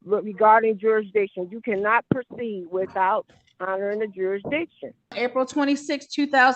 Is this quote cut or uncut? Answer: cut